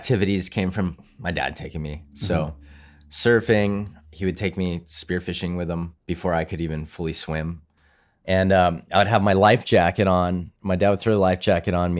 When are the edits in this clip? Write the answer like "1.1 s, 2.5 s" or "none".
1.1 s, 3.9 s, 6.0 s, 7.7 s